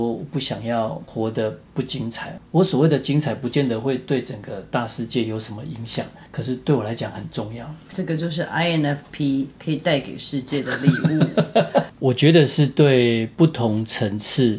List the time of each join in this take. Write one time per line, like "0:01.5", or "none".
0:01.4
0:06.2
0:07.9
0:11.9
0:13.3